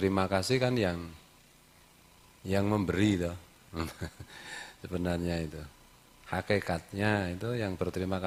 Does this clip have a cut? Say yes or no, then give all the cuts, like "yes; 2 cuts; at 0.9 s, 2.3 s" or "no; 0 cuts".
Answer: no; 0 cuts